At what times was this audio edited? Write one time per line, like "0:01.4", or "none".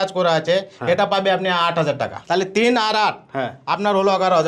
0:02.2

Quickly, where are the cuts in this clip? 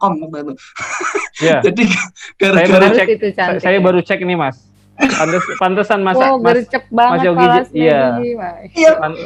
none

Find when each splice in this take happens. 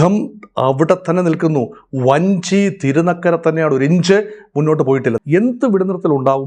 0:05.2

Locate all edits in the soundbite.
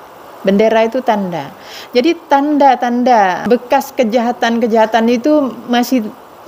0:03.4

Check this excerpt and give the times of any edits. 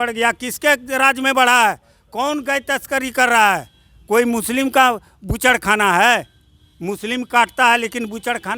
none

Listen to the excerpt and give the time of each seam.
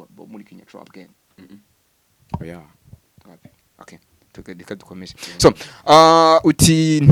none

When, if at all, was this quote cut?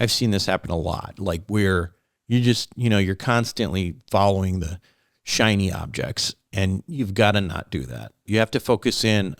0:08.2

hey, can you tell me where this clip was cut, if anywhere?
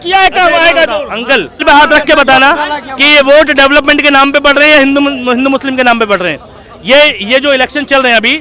0:01.6

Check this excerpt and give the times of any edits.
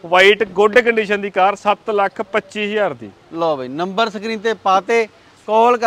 none

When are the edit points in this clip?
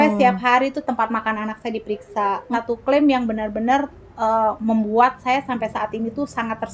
0:02.4

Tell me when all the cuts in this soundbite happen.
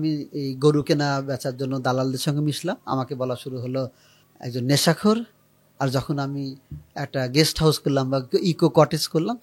none

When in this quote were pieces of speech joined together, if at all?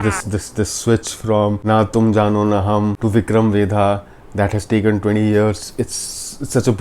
0:01.6
0:03.0

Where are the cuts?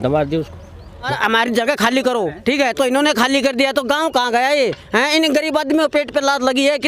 0:01.1

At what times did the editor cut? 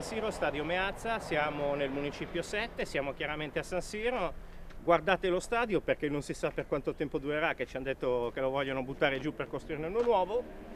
none

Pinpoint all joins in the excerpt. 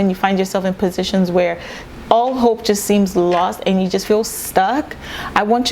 none

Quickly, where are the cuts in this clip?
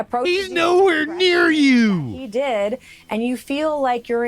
none

